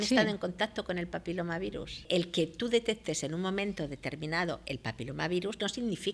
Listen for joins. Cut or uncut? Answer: cut